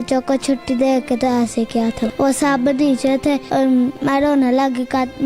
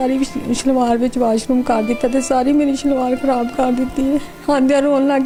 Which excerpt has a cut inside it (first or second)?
first